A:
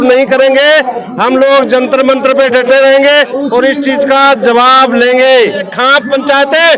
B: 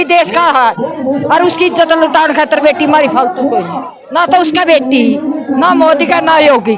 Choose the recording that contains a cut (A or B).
A